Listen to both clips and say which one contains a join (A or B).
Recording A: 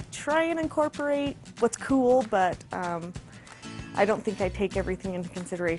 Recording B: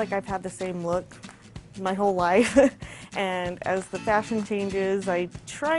A